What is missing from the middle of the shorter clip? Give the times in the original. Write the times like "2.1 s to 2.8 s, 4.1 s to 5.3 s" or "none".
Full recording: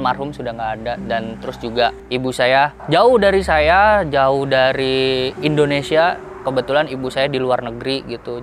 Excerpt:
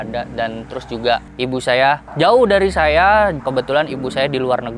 4.1 s to 6.4 s